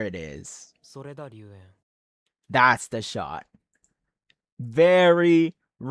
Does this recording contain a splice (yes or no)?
no